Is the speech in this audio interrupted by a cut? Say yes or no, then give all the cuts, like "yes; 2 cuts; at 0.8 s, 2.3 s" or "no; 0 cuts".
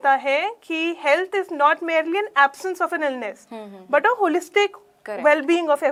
no; 0 cuts